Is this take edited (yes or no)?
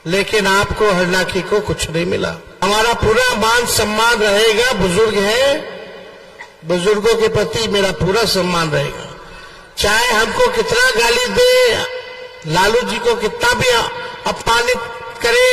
yes